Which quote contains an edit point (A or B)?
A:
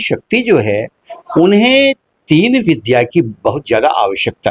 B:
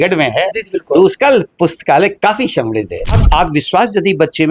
B